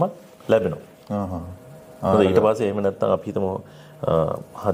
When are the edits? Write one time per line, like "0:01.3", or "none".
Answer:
none

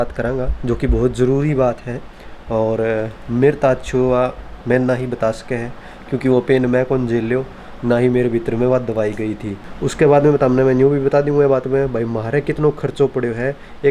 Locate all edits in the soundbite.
0:09.6

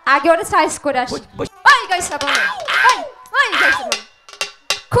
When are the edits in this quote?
0:01.5

